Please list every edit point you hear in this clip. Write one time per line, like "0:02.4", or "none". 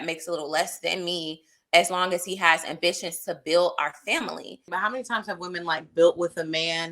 0:04.6